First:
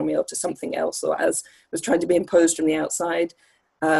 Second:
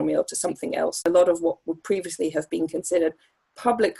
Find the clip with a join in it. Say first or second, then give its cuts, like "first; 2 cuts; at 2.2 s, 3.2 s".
second; 1 cut; at 1.0 s